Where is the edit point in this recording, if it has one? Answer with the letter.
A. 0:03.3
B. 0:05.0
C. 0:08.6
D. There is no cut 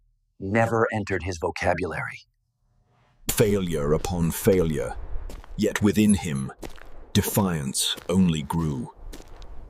A